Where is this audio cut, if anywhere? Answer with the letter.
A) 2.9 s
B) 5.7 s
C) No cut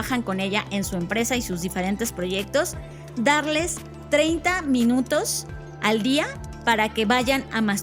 C